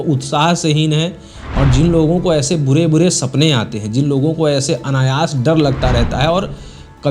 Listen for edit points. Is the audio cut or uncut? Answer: uncut